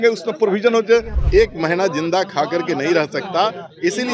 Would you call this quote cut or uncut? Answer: cut